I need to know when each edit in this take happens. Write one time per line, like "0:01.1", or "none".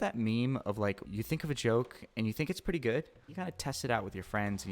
0:01.1
0:03.3